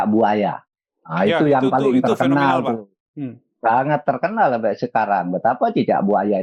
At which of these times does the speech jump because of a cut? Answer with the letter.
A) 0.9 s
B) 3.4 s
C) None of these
C